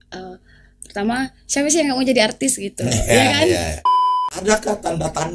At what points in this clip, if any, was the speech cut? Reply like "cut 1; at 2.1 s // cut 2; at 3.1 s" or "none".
cut 1; at 3.8 s

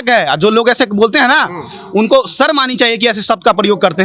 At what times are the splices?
none

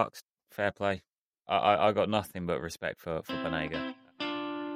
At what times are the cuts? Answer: cut 1; at 1.1 s // cut 2; at 3.6 s

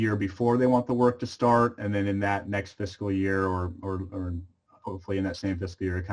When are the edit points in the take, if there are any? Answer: none

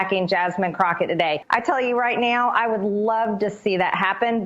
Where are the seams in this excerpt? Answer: cut 1; at 1.4 s

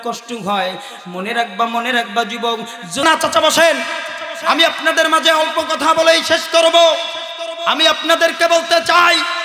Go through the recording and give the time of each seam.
cut 1; at 3.0 s

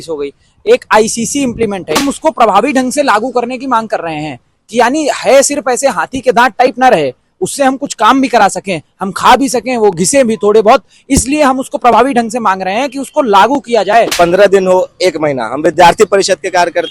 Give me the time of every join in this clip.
cut 1; at 2.0 s // cut 2; at 14.1 s

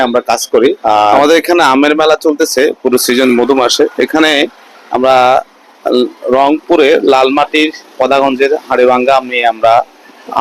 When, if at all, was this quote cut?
cut 1; at 1.1 s

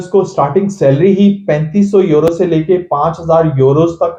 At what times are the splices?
none

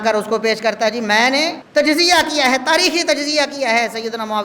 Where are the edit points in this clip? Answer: cut 1; at 1.6 s

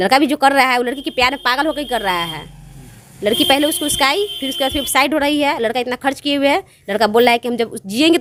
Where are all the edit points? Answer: none

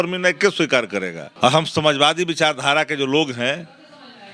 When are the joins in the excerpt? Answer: cut 1; at 1.2 s

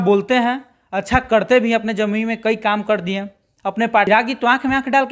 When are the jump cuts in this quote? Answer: cut 1; at 4.1 s

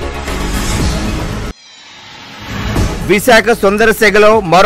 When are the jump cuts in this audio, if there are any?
cut 1; at 1.1 s // cut 2; at 2.7 s

